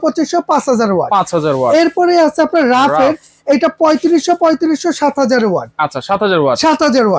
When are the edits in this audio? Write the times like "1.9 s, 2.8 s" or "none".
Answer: none